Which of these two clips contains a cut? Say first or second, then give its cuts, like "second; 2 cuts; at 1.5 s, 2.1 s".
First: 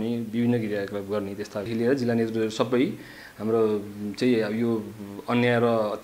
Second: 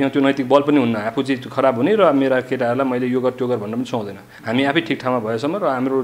first; 1 cut; at 1.7 s